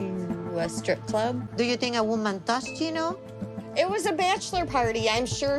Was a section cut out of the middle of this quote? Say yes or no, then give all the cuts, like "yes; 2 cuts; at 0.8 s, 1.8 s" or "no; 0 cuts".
yes; 1 cut; at 1.5 s